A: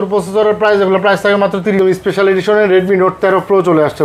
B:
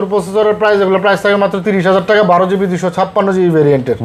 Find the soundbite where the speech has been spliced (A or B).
A